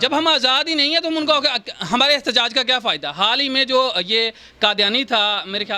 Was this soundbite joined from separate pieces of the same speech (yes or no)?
no